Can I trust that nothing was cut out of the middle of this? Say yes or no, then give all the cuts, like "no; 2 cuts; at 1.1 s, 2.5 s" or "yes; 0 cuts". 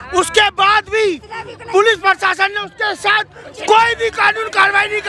yes; 0 cuts